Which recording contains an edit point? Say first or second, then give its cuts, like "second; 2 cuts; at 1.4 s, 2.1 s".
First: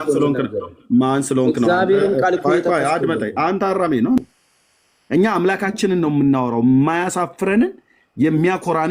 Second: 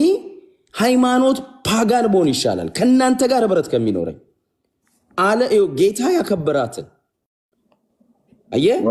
first; 1 cut; at 4.2 s